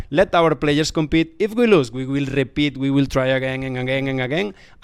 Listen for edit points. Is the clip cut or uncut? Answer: uncut